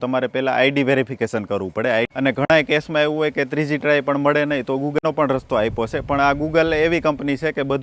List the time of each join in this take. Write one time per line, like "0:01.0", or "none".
0:02.1